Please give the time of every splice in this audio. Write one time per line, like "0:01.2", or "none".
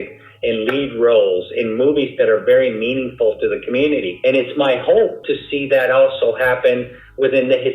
0:04.1
0:05.3